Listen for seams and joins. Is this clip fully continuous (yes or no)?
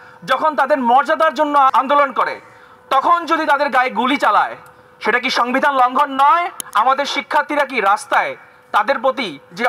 no